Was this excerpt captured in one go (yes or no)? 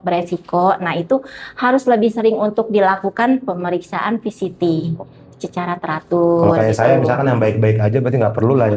yes